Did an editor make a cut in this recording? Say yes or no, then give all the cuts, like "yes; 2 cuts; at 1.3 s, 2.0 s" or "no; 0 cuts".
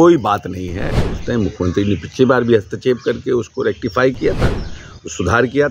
yes; 1 cut; at 1.1 s